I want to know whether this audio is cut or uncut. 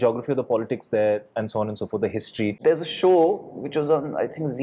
cut